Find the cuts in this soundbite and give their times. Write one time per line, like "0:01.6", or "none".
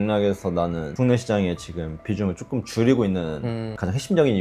none